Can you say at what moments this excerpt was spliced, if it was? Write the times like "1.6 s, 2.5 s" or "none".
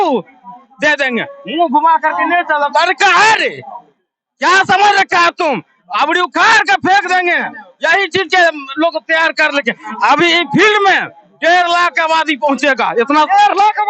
none